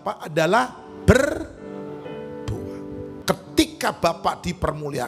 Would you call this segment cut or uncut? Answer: cut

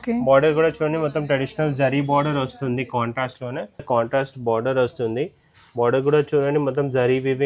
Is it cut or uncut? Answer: cut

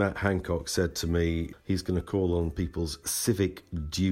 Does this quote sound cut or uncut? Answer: cut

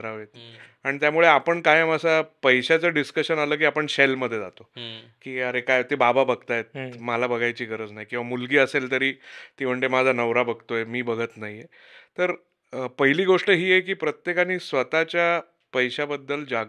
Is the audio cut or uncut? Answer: uncut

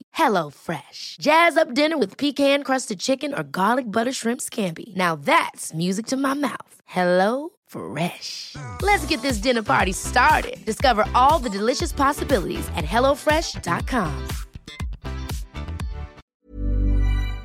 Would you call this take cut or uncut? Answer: cut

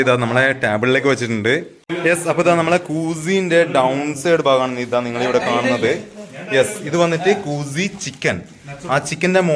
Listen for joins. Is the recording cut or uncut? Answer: cut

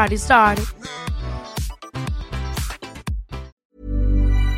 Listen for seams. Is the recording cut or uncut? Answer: cut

